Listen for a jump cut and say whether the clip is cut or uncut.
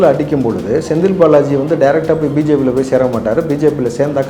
uncut